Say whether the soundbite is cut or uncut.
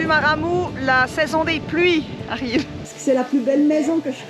cut